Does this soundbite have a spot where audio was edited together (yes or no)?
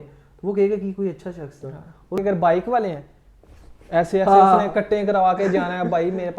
yes